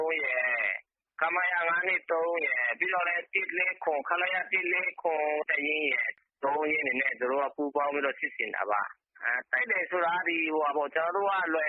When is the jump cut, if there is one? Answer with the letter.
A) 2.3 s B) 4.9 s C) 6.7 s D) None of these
A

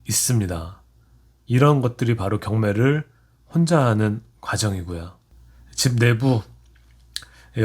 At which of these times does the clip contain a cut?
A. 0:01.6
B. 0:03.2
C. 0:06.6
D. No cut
D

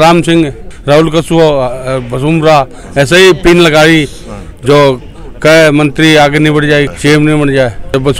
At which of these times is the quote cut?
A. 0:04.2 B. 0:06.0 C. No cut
C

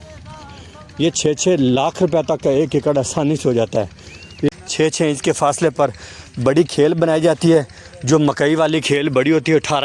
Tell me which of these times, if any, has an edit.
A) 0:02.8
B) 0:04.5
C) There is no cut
B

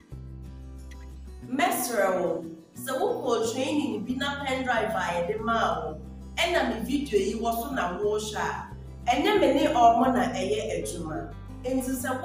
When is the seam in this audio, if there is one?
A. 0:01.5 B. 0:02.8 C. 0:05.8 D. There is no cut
A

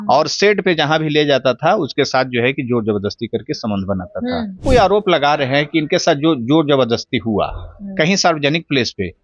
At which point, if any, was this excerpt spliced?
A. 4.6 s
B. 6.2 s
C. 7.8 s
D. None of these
A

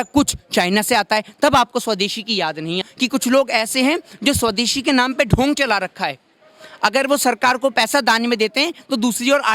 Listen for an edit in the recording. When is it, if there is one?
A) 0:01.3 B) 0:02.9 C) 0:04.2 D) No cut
B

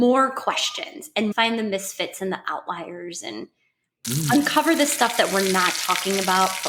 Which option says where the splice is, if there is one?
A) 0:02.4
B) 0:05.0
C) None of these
C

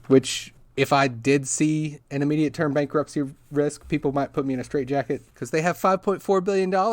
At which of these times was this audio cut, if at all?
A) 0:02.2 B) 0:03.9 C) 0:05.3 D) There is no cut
C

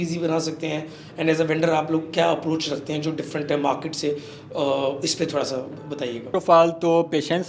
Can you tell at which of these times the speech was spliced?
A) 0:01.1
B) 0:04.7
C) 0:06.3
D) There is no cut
C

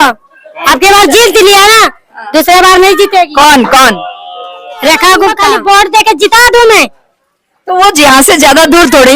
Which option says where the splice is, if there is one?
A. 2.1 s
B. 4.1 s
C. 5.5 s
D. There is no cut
C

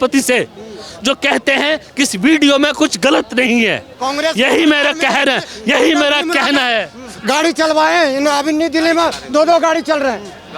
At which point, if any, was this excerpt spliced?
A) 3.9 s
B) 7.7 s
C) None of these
A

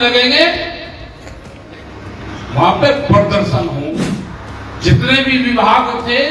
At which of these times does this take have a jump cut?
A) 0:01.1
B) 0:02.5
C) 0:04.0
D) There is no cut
C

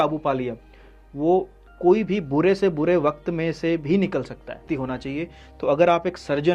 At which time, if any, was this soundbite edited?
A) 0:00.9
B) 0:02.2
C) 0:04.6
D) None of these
C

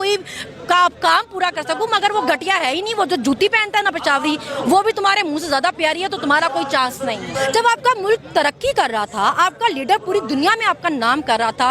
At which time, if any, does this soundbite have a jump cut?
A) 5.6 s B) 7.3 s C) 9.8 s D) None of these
B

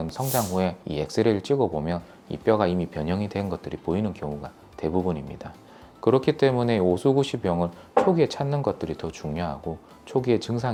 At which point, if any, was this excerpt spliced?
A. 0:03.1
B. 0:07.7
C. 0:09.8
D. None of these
D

